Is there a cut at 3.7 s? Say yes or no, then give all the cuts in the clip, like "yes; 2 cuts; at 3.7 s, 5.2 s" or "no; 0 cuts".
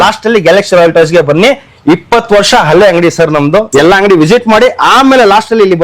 yes; 1 cut; at 3.7 s